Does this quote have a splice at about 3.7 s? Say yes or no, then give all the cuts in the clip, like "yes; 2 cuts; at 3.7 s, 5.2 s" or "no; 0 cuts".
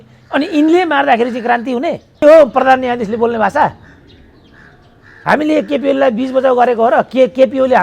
no; 1 cut; at 2.2 s